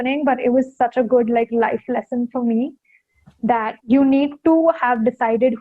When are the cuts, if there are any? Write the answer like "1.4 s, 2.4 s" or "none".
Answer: 3.8 s